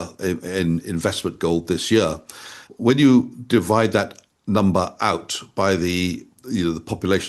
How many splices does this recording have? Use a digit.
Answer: 2